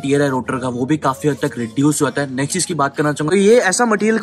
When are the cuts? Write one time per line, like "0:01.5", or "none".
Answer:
0:03.3